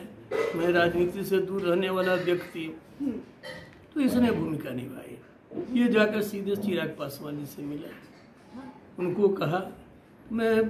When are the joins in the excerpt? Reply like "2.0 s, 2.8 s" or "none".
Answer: none